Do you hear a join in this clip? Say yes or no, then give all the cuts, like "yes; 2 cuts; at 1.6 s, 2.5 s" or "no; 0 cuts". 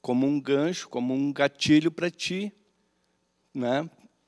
no; 0 cuts